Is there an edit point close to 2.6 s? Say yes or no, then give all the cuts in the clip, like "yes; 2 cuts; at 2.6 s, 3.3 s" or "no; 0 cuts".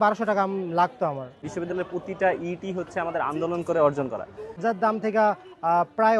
no; 2 cuts; at 1.3 s, 4.6 s